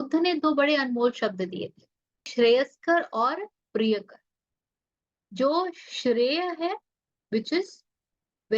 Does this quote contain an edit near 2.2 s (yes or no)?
yes